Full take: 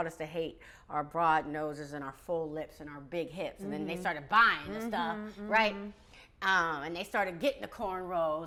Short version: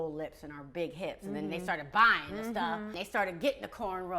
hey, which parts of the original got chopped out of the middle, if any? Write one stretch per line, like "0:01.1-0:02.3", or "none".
0:05.3-0:07.0